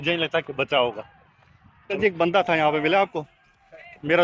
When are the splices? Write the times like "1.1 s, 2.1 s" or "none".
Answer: 1.9 s